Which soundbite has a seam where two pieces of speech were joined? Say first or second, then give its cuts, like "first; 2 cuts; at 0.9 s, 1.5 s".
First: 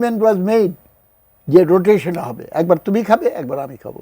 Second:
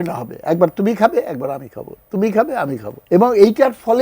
second; 1 cut; at 2.9 s